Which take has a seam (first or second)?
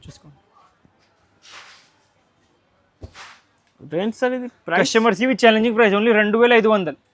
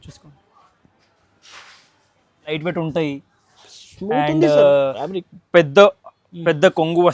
second